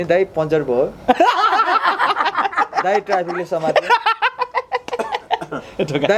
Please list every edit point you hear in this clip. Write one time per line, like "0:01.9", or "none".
none

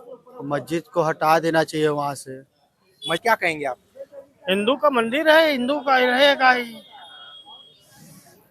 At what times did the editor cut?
0:03.2

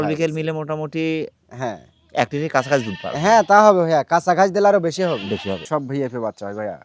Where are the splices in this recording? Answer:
0:05.6

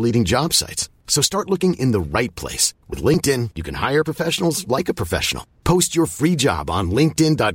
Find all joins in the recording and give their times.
none

